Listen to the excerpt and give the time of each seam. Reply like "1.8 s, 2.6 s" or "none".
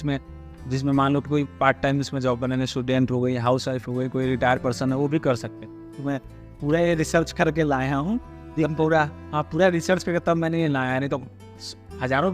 none

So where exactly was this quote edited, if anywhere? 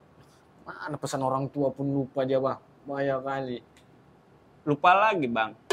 none

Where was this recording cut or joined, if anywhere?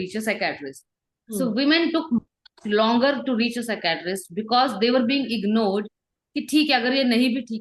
none

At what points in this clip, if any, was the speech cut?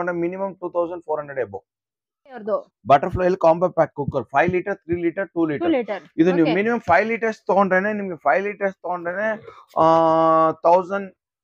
2.4 s

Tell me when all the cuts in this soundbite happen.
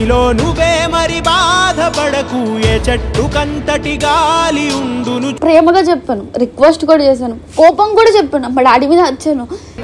5.3 s

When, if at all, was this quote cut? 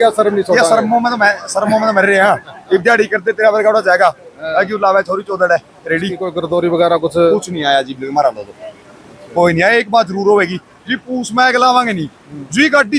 6.3 s

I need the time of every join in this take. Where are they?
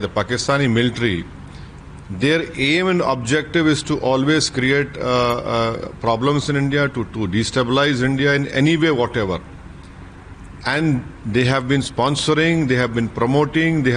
none

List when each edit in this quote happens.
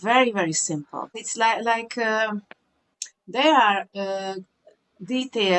1.2 s

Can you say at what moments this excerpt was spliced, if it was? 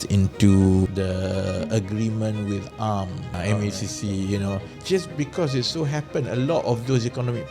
0.9 s, 3.4 s, 4.7 s

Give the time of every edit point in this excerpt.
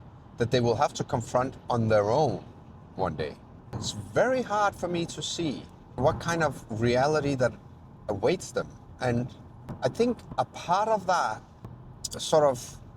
11.5 s

